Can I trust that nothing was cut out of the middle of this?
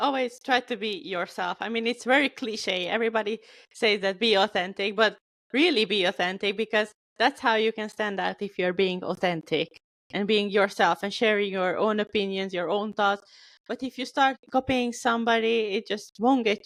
yes; 0 cuts

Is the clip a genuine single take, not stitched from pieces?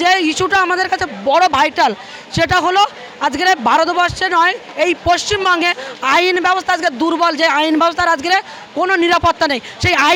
yes; 0 cuts

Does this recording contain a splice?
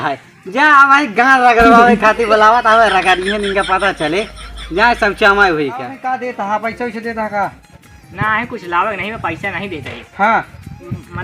yes; 1 cut; at 6.3 s

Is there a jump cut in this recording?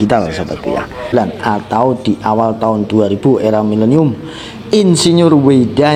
yes; 1 cut; at 1.1 s

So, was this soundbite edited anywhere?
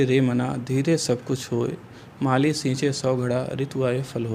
no; 0 cuts

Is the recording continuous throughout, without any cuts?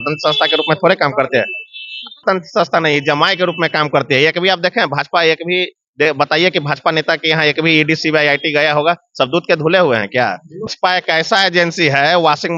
no; 2 cuts; at 2.2 s, 10.7 s

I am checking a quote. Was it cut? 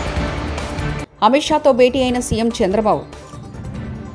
yes; 1 cut; at 1.0 s

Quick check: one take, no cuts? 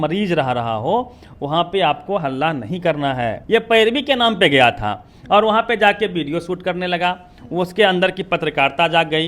no; 1 cut; at 3.4 s

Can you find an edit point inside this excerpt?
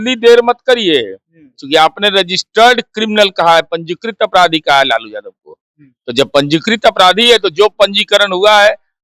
no; 0 cuts

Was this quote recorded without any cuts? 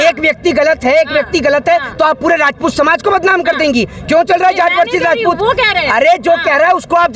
yes; 0 cuts

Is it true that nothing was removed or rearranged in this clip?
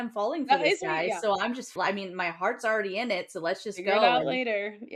no; 1 cut; at 1.8 s

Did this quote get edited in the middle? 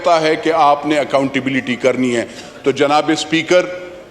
no; 0 cuts

